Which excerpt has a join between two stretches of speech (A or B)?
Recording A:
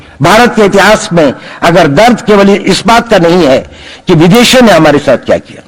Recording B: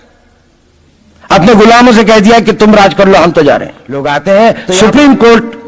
B